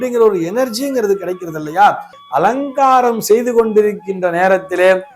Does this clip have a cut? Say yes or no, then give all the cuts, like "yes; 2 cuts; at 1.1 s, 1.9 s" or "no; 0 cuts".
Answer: yes; 1 cut; at 2.1 s